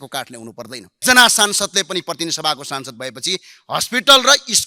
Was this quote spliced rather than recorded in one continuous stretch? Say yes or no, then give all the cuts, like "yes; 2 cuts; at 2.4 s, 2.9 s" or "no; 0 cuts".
yes; 1 cut; at 1.0 s